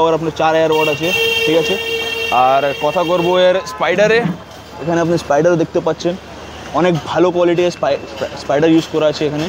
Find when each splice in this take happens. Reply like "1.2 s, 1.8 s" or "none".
none